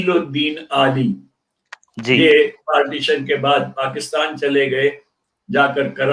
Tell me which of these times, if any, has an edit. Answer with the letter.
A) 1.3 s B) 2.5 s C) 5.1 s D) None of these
D